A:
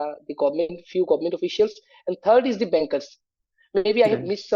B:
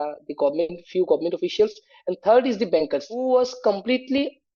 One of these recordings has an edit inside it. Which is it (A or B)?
B